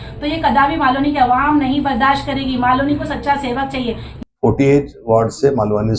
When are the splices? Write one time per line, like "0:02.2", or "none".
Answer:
0:04.1